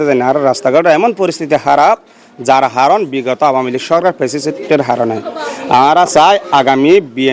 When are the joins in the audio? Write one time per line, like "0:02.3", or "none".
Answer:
none